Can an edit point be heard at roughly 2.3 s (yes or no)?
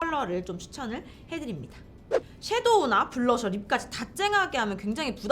yes